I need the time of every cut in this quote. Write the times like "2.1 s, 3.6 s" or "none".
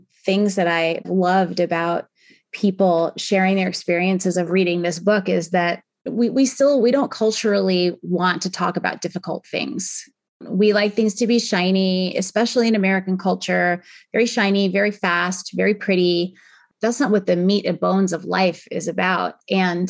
1.0 s